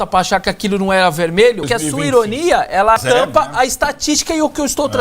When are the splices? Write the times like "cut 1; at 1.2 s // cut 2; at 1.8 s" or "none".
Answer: cut 1; at 1.6 s // cut 2; at 3.0 s